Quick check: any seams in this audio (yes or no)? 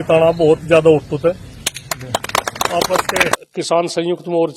yes